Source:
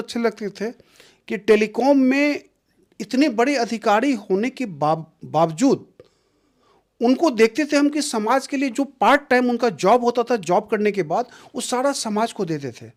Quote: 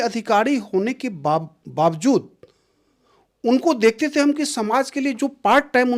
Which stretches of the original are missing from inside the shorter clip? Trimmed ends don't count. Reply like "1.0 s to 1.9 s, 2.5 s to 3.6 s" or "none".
none